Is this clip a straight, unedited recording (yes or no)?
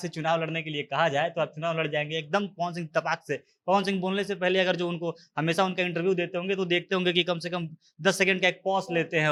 yes